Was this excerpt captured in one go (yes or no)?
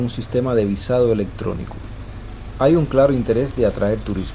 yes